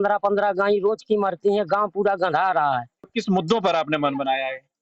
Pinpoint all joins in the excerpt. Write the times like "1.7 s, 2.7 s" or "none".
3.1 s